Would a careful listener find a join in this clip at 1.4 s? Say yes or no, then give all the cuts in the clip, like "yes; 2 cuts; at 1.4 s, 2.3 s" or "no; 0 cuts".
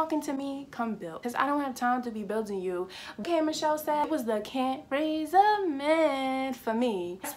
no; 0 cuts